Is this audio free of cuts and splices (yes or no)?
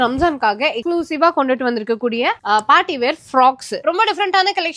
no